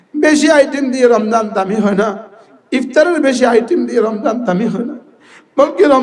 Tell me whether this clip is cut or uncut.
uncut